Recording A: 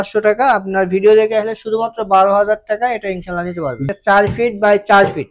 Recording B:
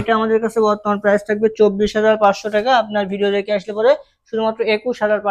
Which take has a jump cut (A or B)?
A